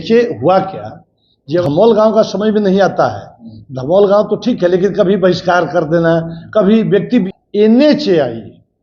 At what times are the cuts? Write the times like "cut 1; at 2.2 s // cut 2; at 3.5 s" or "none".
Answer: cut 1; at 1.6 s // cut 2; at 7.3 s